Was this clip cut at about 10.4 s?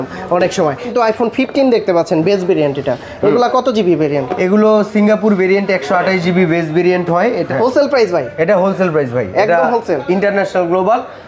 no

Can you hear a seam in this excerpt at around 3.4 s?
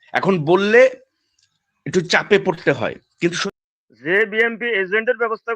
yes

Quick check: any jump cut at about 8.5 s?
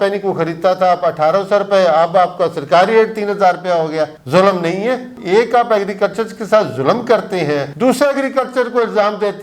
no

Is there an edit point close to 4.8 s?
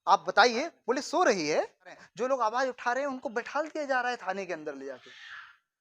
no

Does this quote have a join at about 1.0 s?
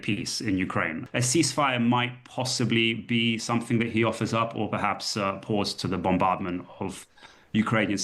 yes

